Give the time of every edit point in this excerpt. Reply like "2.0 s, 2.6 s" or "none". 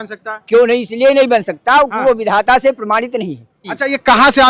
none